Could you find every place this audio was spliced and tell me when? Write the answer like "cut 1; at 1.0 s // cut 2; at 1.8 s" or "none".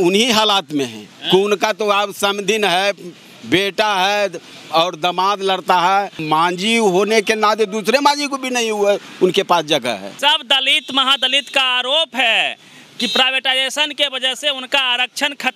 cut 1; at 6.2 s // cut 2; at 10.1 s

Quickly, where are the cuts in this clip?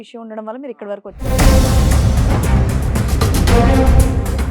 cut 1; at 1.2 s

